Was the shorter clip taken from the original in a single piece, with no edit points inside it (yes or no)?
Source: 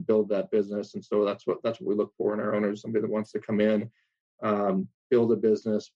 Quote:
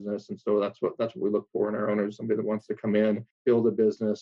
no